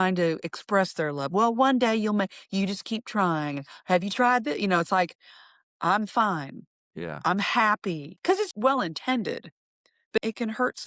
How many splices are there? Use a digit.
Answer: 2